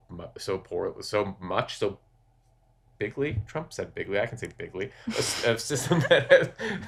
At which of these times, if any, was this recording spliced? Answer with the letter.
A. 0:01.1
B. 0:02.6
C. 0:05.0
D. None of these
D